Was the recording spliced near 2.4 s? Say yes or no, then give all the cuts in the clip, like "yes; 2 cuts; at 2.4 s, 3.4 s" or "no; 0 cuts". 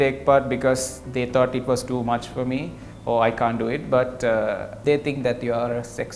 no; 1 cut; at 4.7 s